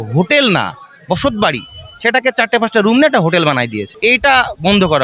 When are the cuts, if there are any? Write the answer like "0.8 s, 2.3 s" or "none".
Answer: none